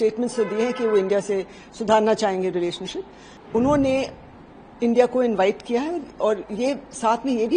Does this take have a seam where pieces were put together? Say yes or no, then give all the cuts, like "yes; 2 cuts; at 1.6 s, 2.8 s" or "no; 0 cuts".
yes; 1 cut; at 3.3 s